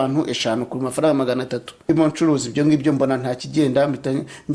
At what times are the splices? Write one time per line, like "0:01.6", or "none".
0:01.9

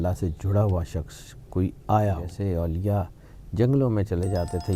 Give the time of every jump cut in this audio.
0:02.3

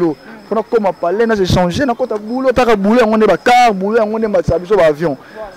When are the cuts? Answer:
none

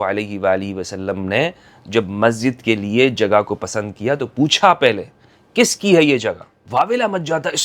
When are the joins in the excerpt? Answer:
0:06.5

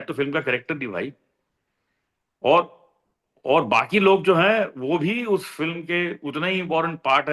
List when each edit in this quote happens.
none

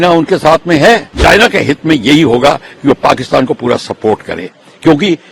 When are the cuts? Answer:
0:01.2

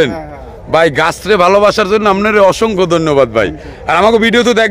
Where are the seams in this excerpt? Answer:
none

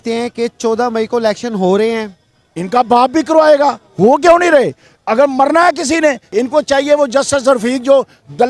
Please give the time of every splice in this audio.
0:06.3

